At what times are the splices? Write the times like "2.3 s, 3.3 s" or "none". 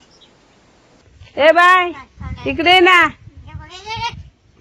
1.0 s